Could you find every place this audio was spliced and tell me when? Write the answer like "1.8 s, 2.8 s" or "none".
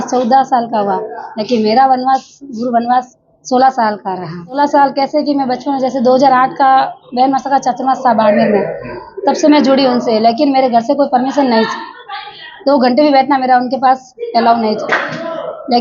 4.6 s